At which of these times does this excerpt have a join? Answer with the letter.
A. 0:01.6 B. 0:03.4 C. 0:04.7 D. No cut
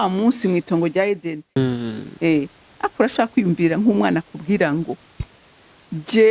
A